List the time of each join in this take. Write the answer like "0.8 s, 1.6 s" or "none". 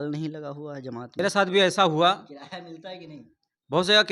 1.2 s